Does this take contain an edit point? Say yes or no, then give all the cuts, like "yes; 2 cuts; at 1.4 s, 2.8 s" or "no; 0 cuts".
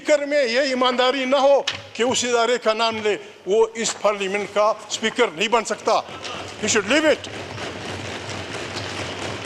no; 0 cuts